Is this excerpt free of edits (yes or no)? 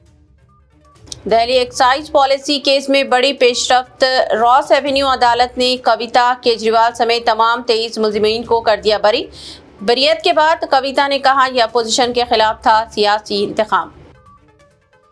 no